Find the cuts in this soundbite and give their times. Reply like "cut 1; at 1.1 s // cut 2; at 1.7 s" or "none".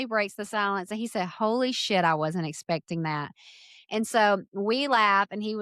none